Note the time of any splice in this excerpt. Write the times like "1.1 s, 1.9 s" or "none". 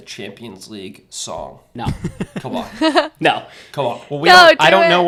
none